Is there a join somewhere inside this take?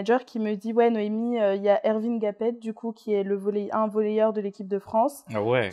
no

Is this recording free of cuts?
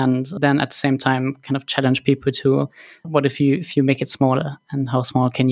yes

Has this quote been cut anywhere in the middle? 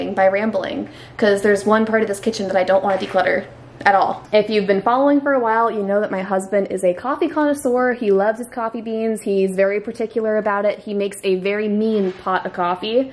no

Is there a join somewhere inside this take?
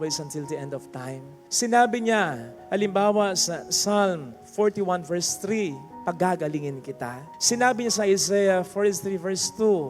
no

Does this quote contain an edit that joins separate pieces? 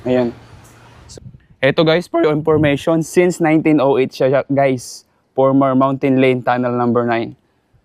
yes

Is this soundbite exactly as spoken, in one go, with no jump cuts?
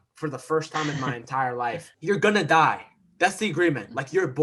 no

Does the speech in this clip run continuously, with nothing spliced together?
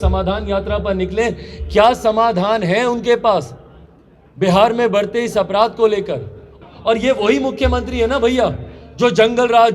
no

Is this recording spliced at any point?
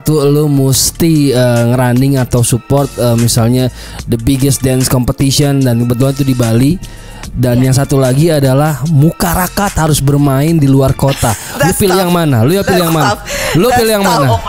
no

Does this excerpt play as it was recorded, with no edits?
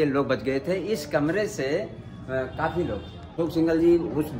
no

